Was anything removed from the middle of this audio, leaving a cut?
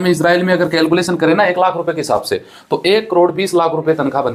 no; 0 cuts

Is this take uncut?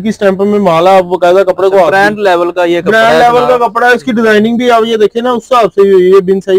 yes; 0 cuts

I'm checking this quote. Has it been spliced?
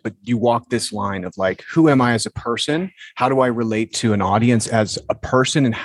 no; 0 cuts

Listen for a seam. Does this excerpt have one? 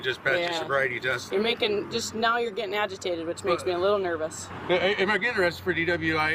yes; 2 cuts; at 1.2 s, 4.5 s

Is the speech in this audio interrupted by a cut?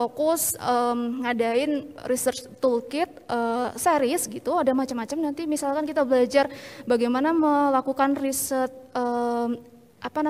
no; 0 cuts

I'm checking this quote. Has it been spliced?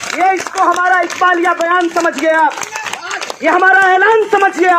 no; 0 cuts

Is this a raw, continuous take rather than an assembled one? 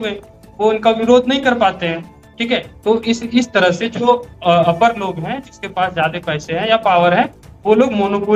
yes; 0 cuts

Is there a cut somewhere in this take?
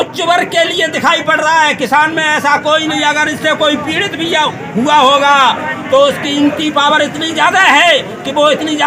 no; 0 cuts

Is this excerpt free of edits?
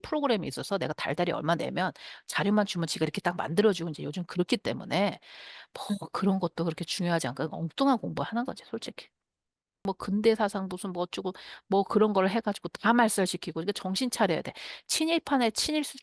no; 1 cut; at 9.8 s

